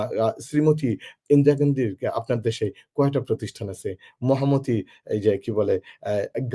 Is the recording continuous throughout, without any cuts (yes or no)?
yes